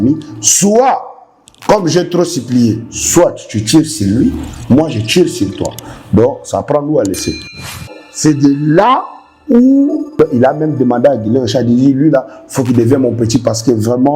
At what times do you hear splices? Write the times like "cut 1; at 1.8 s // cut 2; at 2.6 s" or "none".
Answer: cut 1; at 7.7 s // cut 2; at 10.0 s